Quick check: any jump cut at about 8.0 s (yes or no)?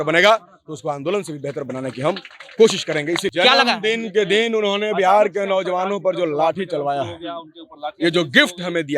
no